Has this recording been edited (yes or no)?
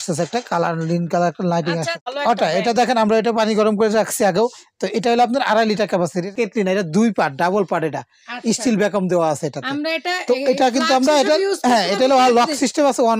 yes